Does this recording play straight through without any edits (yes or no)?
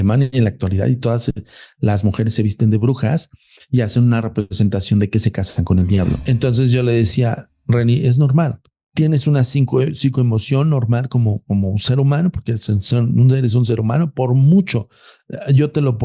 no